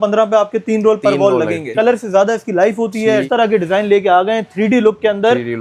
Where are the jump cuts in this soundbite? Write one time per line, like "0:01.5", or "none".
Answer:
0:01.7
0:03.2